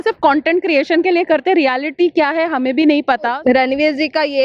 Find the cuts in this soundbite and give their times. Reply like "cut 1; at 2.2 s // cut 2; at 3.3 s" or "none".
cut 1; at 3.3 s